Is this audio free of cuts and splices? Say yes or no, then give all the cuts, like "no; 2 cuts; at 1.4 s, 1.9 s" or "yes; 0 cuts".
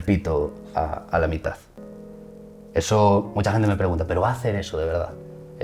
yes; 0 cuts